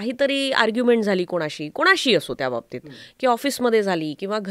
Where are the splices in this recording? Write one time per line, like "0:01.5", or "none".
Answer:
none